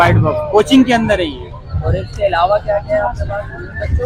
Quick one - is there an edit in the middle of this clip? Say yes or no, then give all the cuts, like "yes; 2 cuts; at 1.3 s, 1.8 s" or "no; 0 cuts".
no; 0 cuts